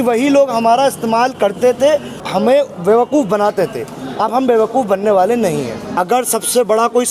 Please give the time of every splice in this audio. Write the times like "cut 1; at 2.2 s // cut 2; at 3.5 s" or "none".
cut 1; at 2.2 s // cut 2; at 5.8 s